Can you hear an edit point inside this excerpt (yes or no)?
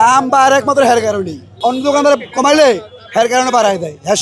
no